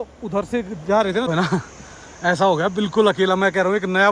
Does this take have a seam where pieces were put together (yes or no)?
yes